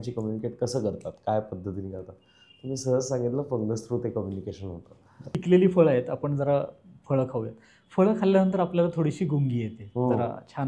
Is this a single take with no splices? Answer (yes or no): no